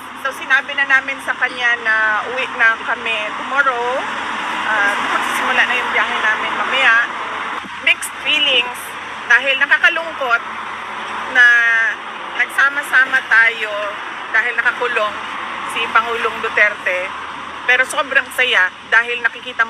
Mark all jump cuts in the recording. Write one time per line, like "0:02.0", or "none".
0:07.6